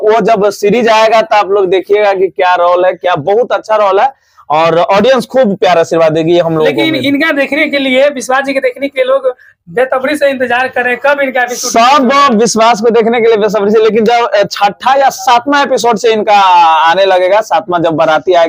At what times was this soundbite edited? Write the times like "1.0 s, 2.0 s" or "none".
none